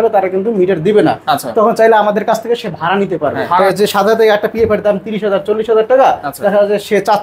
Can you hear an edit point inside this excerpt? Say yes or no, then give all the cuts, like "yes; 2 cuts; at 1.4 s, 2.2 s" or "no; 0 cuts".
yes; 1 cut; at 3.4 s